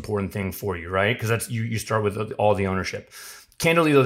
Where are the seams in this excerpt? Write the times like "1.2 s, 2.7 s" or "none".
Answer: none